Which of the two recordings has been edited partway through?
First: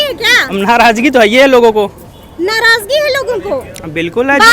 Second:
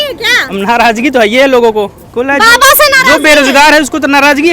second; 1 cut; at 2.0 s

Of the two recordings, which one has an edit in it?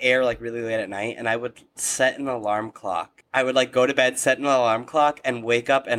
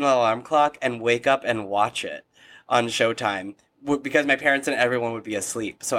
first; 1 cut; at 3.2 s

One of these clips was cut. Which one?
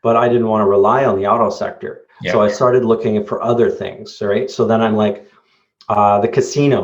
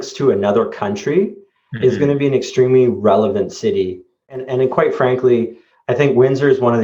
second; 1 cut; at 4.3 s

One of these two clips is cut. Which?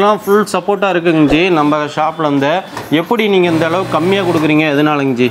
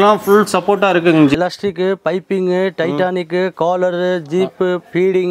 second; 1 cut; at 1.3 s

